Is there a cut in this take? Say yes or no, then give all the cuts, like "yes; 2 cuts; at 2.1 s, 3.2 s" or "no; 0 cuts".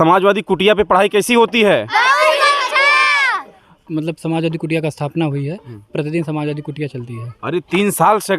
yes; 1 cut; at 3.7 s